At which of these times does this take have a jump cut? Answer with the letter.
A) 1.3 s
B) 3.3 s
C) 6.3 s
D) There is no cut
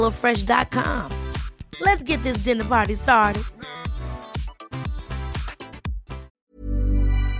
C